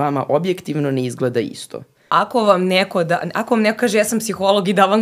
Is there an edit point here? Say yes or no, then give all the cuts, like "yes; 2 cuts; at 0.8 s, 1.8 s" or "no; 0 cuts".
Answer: yes; 1 cut; at 2.0 s